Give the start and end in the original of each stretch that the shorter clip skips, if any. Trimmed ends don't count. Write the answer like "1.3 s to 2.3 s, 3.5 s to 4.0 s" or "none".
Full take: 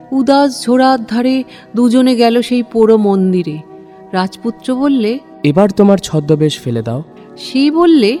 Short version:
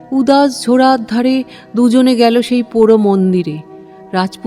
none